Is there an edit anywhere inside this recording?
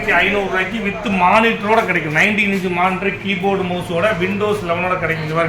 no; 0 cuts

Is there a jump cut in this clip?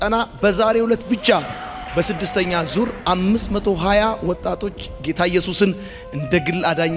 no; 0 cuts

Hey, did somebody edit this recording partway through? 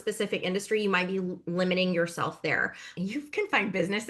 yes; 1 cut; at 3.0 s

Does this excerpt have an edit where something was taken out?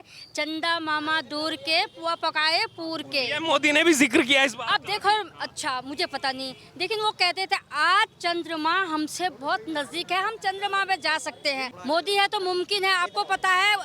yes; 1 cut; at 11.7 s

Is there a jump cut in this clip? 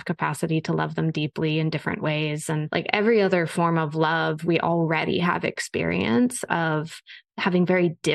yes; 1 cut; at 2.7 s

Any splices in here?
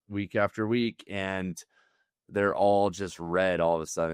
no; 0 cuts

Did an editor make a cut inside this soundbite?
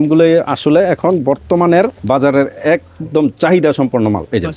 yes; 1 cut; at 2.0 s

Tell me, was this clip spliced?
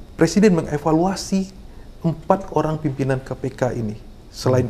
no; 0 cuts

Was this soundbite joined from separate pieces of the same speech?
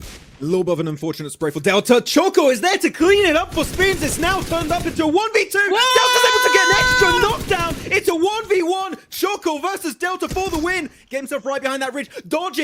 no; 0 cuts

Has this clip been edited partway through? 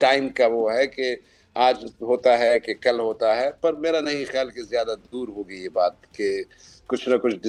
no; 0 cuts

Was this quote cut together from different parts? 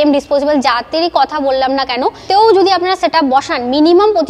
yes; 1 cut; at 2.2 s

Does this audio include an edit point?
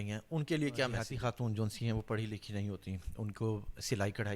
yes; 1 cut; at 1.1 s

